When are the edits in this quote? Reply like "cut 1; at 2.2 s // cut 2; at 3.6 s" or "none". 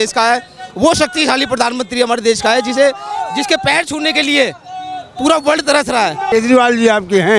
cut 1; at 6.3 s